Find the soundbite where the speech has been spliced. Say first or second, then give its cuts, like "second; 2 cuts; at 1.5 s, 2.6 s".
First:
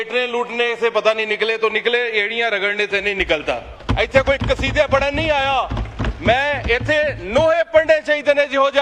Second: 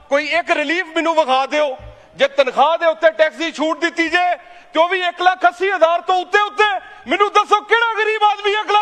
first; 1 cut; at 3.7 s